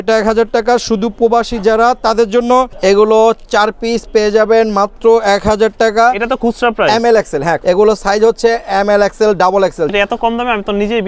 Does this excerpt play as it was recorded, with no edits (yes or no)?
no